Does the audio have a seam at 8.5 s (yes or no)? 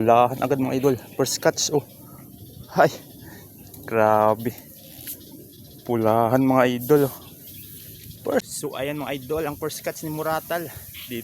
yes